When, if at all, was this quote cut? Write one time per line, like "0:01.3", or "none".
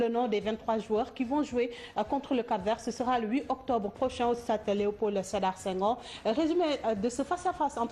0:03.2